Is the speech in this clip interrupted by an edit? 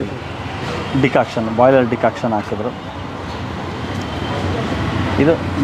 no; 0 cuts

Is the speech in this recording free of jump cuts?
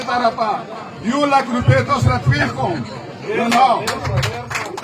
yes; 0 cuts

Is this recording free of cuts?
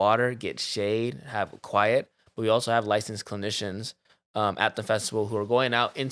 yes; 0 cuts

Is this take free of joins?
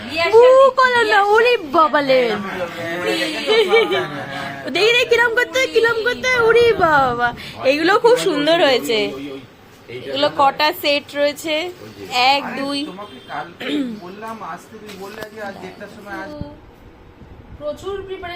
yes; 0 cuts

